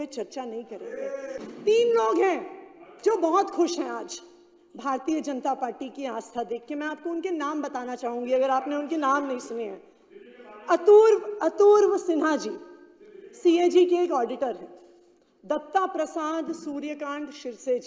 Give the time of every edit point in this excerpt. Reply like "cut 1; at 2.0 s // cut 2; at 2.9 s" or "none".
cut 1; at 1.4 s